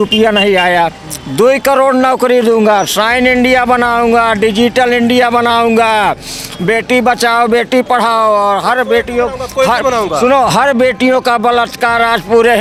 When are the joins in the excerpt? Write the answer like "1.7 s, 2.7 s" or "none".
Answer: none